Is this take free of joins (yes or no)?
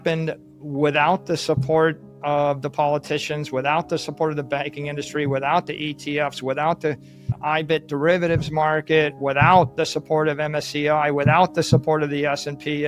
yes